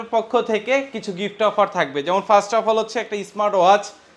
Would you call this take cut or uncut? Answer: uncut